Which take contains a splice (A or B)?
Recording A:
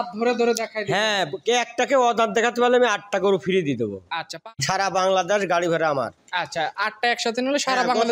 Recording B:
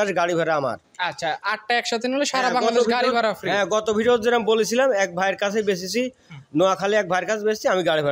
A